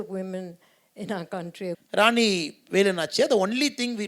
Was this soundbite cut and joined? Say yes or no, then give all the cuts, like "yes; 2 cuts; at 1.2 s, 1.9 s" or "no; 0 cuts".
yes; 1 cut; at 1.8 s